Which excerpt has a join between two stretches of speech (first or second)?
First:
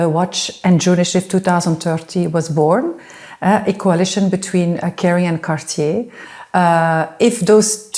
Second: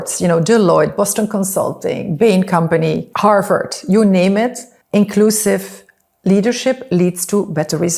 second